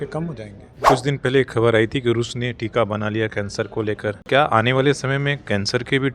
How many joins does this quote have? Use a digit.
2